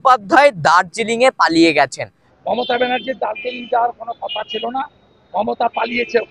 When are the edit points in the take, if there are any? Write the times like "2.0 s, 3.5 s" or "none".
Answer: 2.2 s

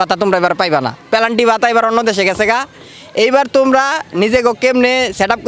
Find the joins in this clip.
none

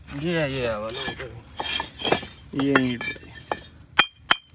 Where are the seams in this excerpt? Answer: none

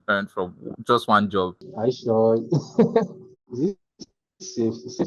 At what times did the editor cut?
1.6 s, 3.4 s

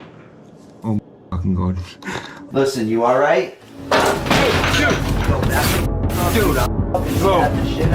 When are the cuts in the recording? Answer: 2.3 s

